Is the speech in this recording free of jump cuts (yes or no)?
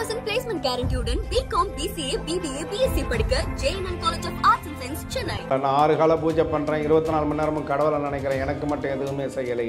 no